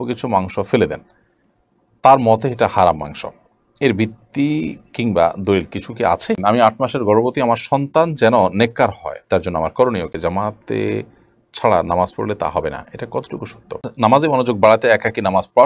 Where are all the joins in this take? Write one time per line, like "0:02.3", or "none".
0:06.4
0:10.1
0:13.9